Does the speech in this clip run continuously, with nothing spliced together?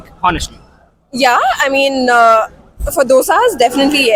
yes; 0 cuts

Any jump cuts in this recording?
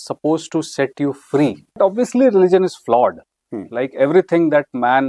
yes; 1 cut; at 1.8 s

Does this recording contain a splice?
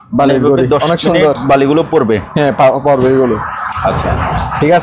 no; 0 cuts

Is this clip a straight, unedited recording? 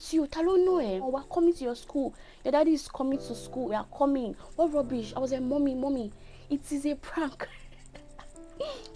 no; 2 cuts; at 1.1 s, 3.7 s

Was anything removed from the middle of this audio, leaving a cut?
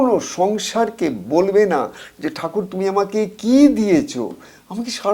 no; 0 cuts

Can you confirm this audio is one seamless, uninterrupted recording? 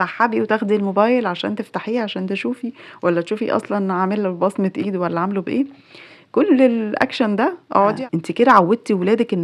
no; 1 cut; at 8.0 s

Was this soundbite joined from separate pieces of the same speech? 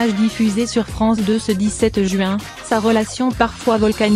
no; 0 cuts

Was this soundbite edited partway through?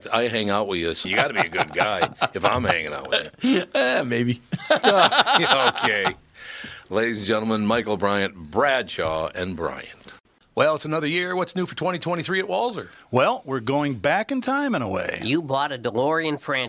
yes; 1 cut; at 10.2 s

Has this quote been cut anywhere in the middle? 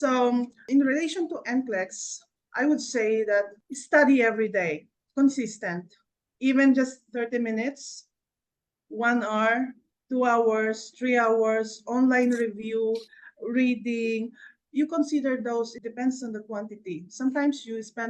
yes; 1 cut; at 15.8 s

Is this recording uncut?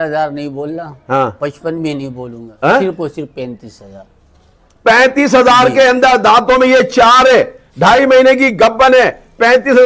yes; 0 cuts

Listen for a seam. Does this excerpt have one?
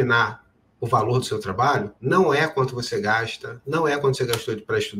yes; 1 cut; at 1.9 s

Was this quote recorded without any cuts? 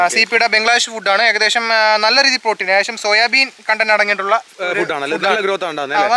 yes; 0 cuts

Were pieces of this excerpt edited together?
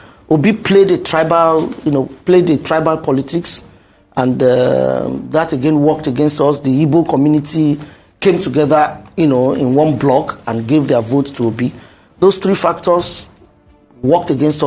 no; 0 cuts

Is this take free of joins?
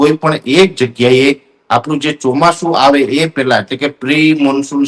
yes; 0 cuts

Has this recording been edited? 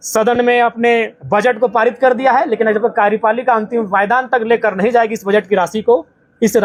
no; 0 cuts

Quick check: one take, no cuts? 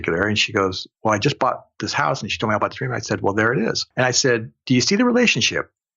no; 1 cut; at 3.8 s

